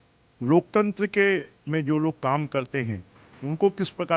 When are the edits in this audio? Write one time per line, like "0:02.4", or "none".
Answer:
0:01.6